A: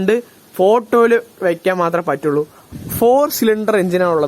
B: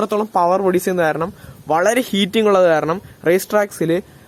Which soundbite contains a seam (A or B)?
A